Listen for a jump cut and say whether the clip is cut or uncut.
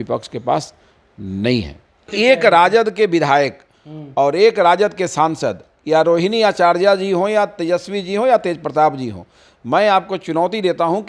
cut